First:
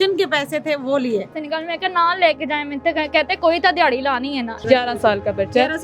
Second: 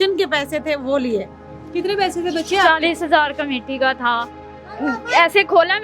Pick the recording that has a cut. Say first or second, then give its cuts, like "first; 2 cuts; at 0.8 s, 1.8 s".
first; 2 cuts; at 1.4 s, 4.6 s